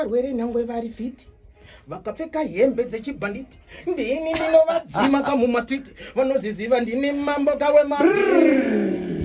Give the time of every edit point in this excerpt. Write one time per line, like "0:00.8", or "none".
none